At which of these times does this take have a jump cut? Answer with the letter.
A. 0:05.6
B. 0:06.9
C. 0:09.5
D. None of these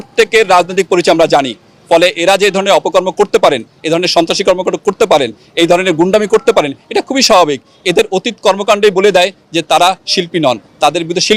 D